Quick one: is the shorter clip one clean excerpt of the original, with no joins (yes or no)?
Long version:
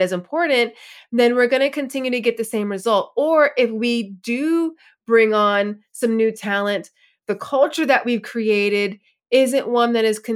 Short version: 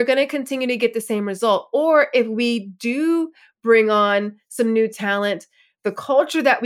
yes